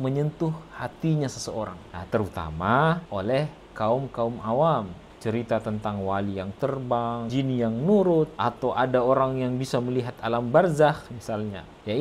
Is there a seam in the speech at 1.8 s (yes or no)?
no